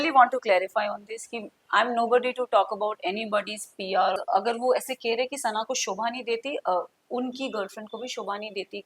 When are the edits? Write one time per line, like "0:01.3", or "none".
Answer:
0:04.2